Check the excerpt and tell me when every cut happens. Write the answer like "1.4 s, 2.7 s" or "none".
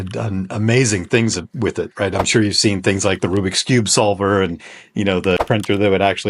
5.4 s